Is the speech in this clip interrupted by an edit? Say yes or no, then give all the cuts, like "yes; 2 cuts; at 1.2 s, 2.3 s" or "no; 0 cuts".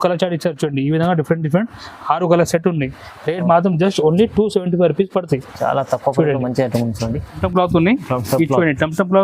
yes; 1 cut; at 7.4 s